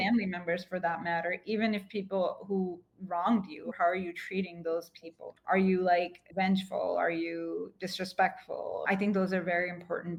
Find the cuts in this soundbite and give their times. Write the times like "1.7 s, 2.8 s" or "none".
none